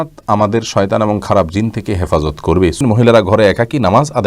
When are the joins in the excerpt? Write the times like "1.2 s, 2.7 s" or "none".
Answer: 2.8 s